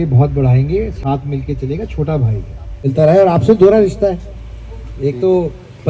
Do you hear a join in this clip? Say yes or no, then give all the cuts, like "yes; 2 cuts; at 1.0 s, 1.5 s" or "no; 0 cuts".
yes; 1 cut; at 2.9 s